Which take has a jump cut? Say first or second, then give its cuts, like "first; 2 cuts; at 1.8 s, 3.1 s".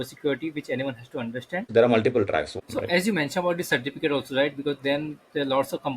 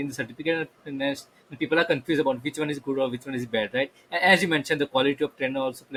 first; 2 cuts; at 1.6 s, 2.5 s